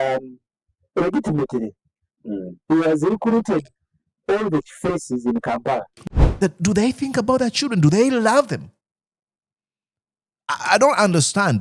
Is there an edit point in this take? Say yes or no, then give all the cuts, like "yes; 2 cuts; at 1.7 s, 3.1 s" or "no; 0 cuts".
yes; 1 cut; at 5.9 s